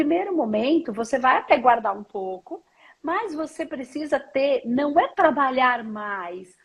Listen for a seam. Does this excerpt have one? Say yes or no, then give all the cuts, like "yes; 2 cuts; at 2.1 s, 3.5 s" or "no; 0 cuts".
no; 0 cuts